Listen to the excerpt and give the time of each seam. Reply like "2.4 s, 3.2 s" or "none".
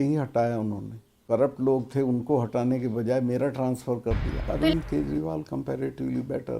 4.5 s

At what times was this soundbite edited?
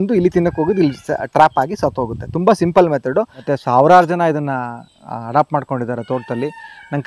3.4 s

